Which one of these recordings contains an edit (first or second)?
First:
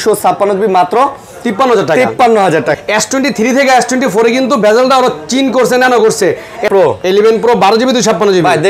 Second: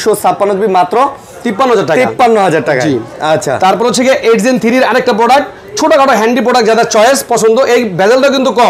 first